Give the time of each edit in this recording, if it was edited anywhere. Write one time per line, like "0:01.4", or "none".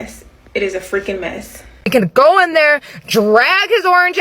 0:01.9